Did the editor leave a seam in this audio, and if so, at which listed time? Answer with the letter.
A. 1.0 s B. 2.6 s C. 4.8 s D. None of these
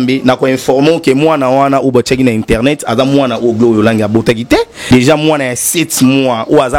C